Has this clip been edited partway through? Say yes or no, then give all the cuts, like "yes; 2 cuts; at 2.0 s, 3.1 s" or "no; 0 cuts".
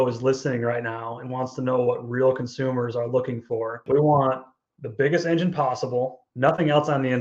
yes; 2 cuts; at 3.8 s, 6.2 s